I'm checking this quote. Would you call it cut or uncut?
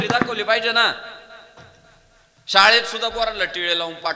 uncut